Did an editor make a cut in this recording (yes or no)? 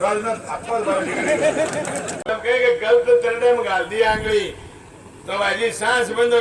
yes